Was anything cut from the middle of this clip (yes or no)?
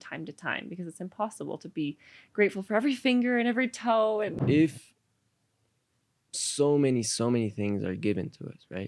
yes